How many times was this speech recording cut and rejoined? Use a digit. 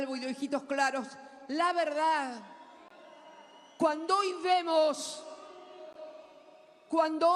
0